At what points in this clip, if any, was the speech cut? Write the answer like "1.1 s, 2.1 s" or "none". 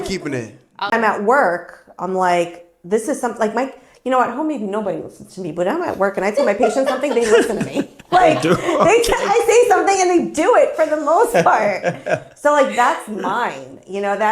0.9 s